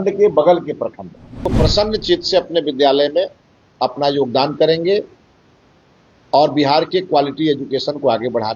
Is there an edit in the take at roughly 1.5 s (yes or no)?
yes